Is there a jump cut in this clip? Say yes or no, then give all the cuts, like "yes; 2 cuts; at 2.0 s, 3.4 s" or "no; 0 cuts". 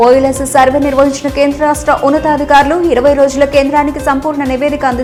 no; 0 cuts